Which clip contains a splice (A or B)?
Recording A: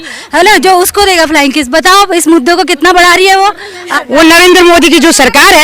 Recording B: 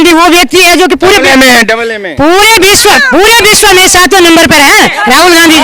A